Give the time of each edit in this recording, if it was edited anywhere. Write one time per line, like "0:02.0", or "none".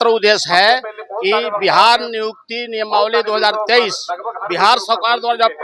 none